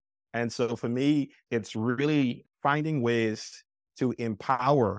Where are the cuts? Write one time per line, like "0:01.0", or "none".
0:01.4
0:02.4

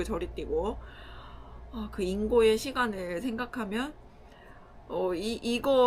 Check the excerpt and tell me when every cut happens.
none

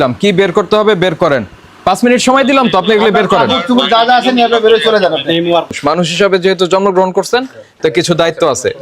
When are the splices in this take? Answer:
0:01.8
0:05.8

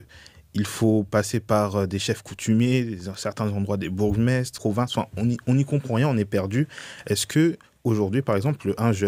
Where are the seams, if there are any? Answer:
0:04.5

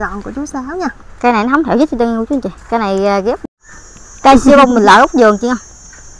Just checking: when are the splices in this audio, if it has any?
0:03.4

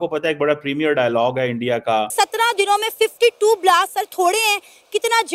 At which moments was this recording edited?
0:02.3

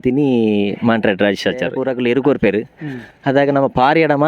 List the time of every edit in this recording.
0:01.8

